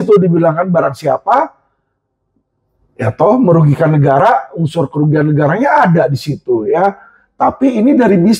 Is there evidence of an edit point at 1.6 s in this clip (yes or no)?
no